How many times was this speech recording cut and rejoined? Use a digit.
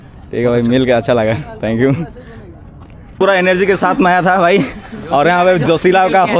1